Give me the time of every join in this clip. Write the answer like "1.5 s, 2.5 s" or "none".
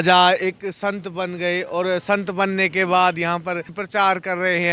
3.8 s

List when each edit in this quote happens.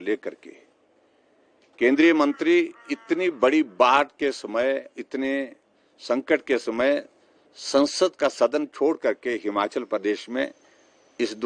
4.7 s

